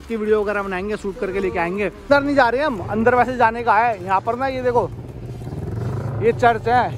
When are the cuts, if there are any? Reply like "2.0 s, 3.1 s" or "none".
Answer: 2.0 s